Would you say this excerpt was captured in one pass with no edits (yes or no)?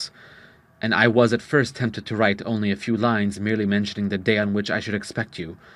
yes